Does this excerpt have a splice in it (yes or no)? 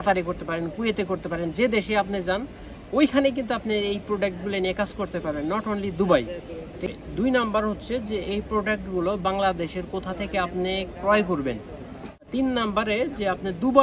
yes